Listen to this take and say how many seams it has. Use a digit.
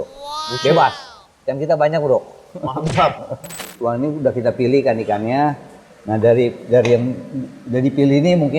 1